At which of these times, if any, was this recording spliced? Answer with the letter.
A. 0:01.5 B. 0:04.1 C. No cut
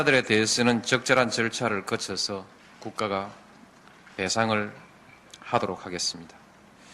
A